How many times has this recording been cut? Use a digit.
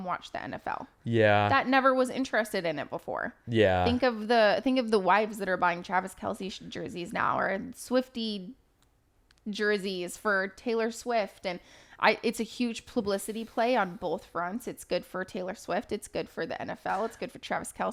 0